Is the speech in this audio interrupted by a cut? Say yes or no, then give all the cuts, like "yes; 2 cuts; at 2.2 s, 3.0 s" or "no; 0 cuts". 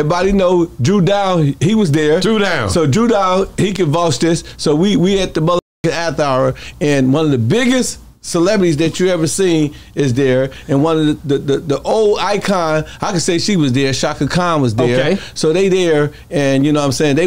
no; 0 cuts